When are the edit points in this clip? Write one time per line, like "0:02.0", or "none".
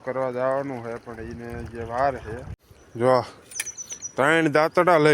0:02.9